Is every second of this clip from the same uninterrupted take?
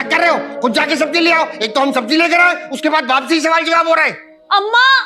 yes; 0 cuts

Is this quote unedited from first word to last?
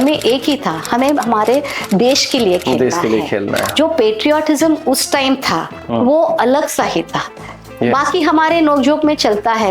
no; 1 cut; at 5.8 s

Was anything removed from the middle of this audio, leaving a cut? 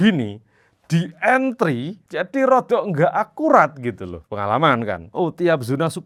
no; 0 cuts

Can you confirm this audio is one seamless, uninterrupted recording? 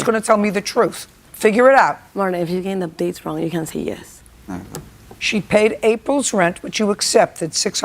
no; 2 cuts; at 2.0 s, 5.5 s

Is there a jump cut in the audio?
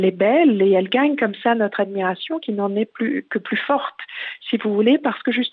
no; 0 cuts

